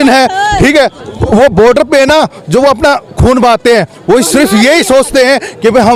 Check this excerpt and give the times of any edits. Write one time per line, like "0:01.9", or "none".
none